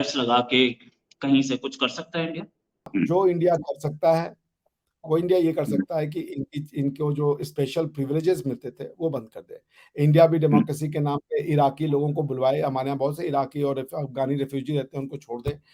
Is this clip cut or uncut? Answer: cut